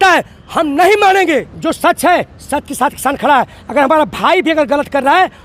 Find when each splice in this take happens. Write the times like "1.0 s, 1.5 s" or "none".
1.5 s